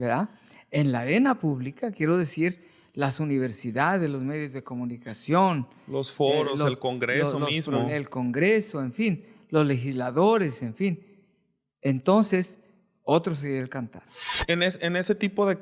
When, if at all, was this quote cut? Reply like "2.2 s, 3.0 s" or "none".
14.3 s